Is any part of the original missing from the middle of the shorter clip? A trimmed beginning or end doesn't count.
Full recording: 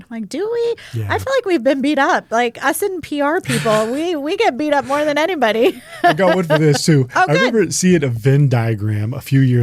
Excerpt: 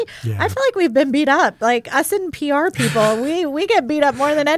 no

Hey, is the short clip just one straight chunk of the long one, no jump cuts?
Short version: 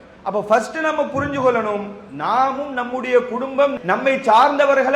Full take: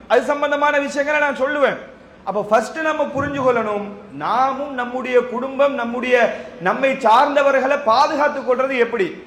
no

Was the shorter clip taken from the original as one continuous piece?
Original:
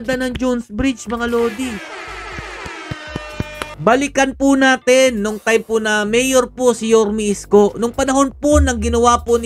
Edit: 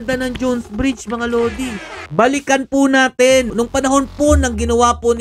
no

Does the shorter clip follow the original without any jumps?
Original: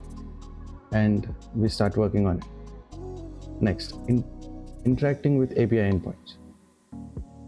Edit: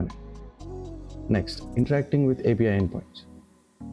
no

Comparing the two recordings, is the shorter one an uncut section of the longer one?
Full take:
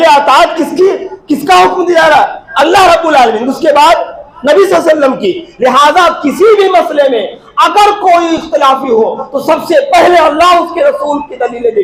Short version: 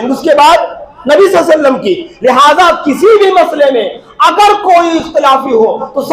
yes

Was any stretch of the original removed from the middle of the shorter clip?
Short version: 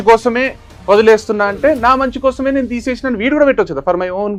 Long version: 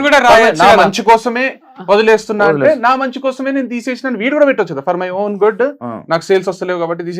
no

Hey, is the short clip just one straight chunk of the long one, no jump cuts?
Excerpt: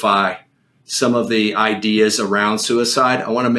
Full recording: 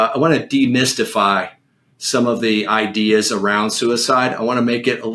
yes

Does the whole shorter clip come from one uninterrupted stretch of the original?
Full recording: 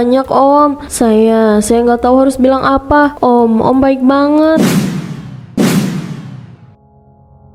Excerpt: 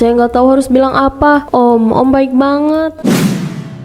no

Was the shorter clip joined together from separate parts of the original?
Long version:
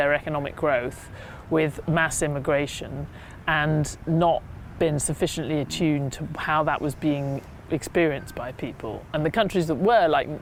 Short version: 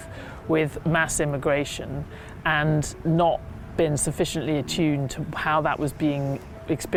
no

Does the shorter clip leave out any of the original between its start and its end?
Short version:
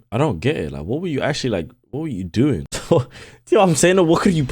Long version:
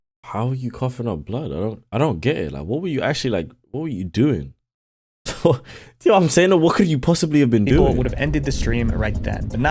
yes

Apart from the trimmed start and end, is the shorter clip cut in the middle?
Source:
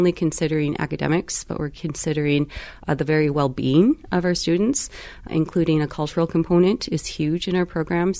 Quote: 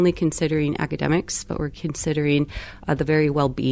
no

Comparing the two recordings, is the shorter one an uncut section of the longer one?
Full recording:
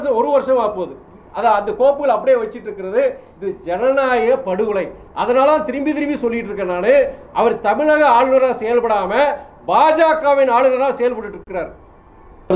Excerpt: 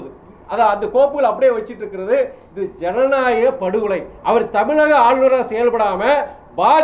no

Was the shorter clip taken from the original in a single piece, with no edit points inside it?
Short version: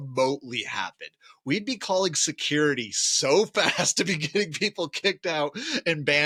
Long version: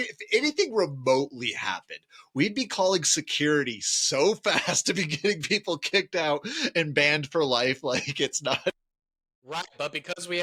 yes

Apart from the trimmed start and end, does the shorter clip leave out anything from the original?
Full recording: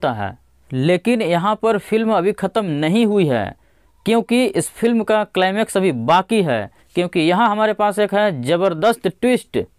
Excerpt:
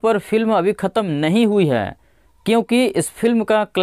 no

